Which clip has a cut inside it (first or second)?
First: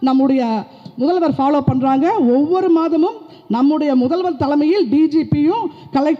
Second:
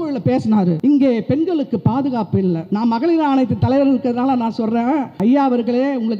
second